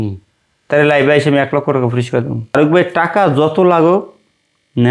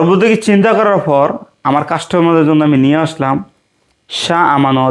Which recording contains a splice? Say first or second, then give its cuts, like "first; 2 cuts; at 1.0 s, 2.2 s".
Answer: first; 1 cut; at 2.4 s